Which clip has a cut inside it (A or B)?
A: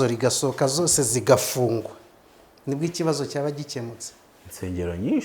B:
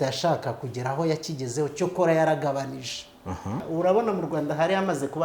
B